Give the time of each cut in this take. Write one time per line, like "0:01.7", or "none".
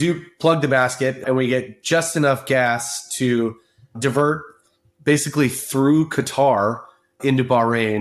0:01.2
0:04.0
0:07.1